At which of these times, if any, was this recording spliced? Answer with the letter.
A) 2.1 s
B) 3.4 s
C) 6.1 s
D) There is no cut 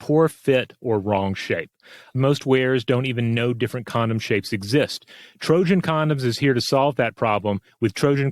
A